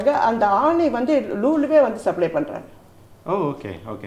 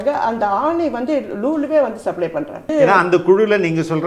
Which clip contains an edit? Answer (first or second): second